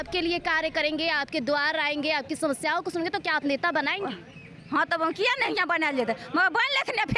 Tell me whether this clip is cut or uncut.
uncut